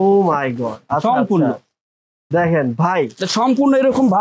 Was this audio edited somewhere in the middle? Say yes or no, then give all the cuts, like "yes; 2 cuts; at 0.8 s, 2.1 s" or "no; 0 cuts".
no; 0 cuts